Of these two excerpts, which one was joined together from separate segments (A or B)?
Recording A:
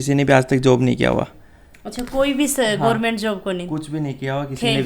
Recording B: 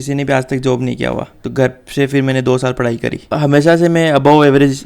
B